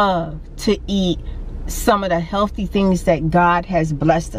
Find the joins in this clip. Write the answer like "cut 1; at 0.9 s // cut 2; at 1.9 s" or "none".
none